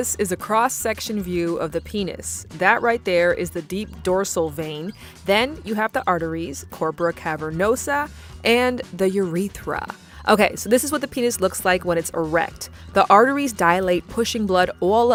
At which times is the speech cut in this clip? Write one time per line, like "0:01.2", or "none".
none